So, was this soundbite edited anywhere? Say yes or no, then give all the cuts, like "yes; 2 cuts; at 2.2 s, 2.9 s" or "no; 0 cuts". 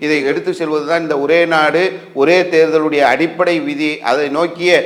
no; 0 cuts